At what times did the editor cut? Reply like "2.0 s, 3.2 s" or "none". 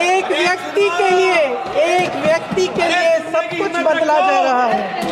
none